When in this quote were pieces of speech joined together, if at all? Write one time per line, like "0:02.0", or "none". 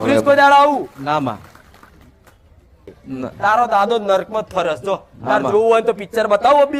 0:02.8